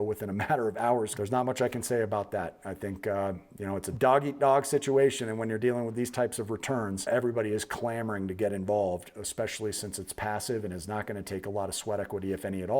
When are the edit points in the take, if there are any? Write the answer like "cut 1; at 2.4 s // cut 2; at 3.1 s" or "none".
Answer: cut 1; at 1.1 s // cut 2; at 3.9 s // cut 3; at 7.1 s